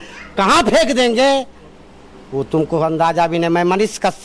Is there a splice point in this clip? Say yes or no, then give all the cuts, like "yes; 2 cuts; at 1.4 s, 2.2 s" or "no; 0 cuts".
no; 0 cuts